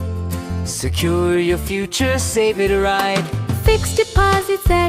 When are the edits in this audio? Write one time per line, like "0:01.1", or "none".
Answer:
none